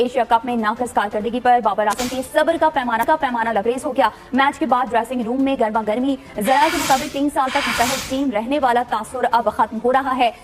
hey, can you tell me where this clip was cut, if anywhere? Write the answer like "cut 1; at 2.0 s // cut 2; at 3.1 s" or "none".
none